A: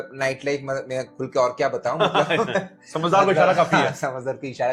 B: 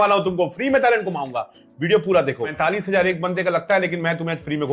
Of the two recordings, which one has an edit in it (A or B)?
B